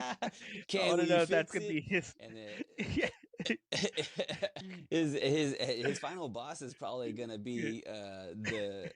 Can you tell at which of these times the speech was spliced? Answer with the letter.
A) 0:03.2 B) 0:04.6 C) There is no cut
B